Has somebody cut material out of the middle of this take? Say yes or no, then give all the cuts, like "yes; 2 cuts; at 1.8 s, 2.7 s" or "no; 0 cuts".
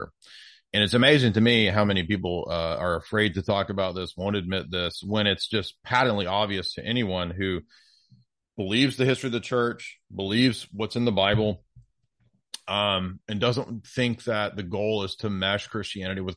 no; 0 cuts